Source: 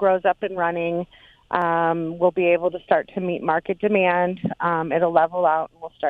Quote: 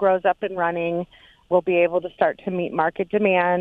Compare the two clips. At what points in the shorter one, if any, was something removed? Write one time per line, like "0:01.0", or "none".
0:01.4